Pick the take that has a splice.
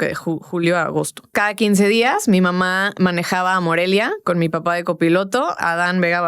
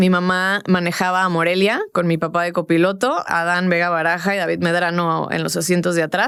first; 1 cut; at 1.3 s

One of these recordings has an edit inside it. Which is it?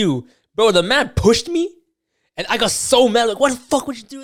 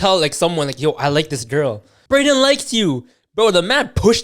second; 1 cut; at 1.9 s

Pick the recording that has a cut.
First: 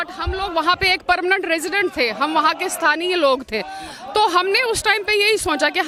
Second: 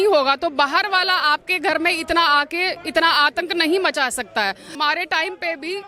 second; 1 cut; at 4.7 s

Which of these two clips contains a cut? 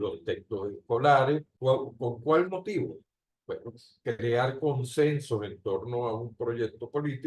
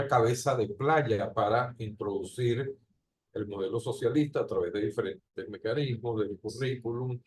first; 1 cut; at 1.5 s

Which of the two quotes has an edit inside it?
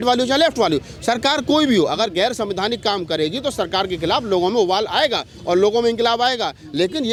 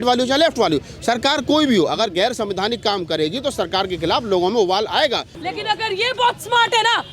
second; 1 cut; at 5.3 s

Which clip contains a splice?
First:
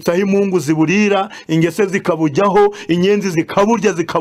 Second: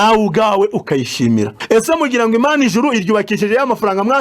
second; 1 cut; at 1.6 s

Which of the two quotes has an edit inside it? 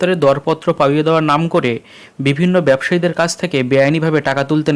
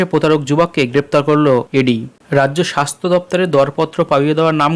second; 1 cut; at 1.7 s

